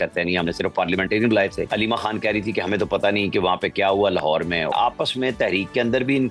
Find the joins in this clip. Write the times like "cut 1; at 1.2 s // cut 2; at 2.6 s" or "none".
cut 1; at 1.6 s // cut 2; at 4.7 s